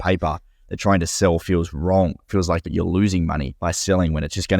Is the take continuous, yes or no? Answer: no